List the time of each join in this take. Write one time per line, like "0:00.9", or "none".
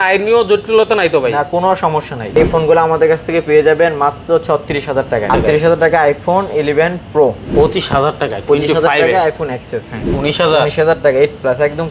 0:02.3
0:05.3
0:07.4
0:10.0

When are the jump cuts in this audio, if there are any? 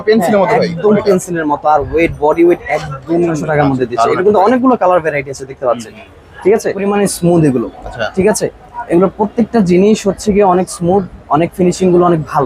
0:03.4
0:06.8

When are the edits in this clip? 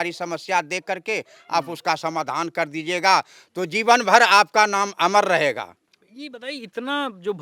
none

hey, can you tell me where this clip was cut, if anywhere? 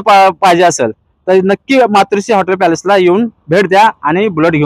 none

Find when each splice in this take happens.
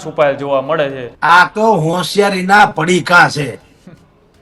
0:01.1

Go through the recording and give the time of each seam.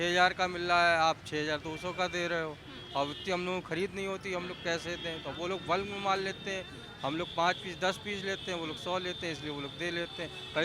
none

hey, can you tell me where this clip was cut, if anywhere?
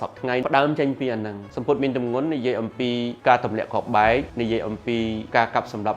0:01.5

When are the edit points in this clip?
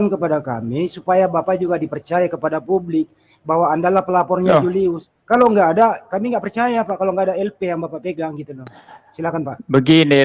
none

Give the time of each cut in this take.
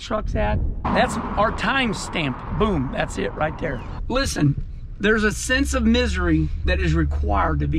0:00.8
0:03.9
0:06.6

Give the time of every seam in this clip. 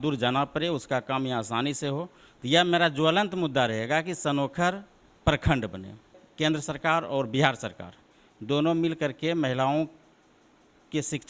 0:06.2

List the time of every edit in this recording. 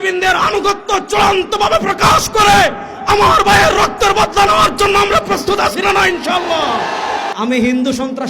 0:07.3

